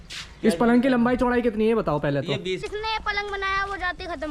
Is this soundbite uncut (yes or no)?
no